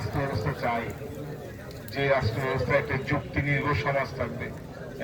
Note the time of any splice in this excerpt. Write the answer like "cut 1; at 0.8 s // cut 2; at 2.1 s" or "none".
none